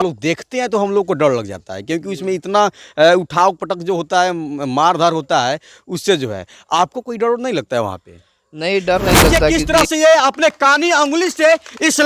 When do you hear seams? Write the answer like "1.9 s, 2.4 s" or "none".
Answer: 9.5 s